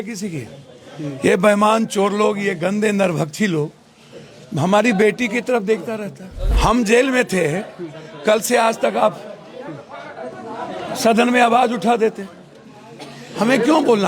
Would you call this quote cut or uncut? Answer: cut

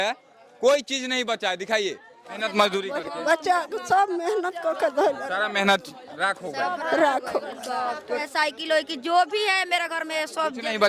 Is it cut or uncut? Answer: cut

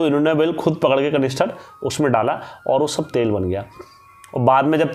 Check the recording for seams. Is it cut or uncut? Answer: uncut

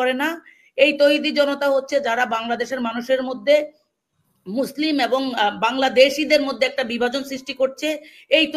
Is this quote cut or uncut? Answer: uncut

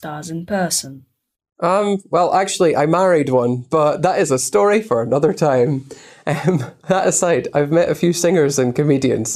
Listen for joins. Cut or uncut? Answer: uncut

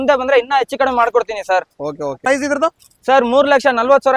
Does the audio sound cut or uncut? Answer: cut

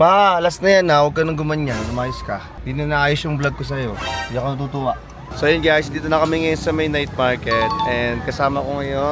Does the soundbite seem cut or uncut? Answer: uncut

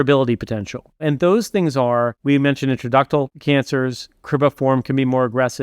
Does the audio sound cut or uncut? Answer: cut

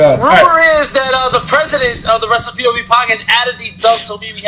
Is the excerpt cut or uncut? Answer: uncut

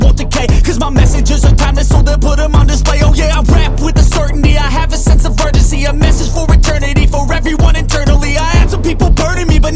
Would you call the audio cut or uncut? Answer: uncut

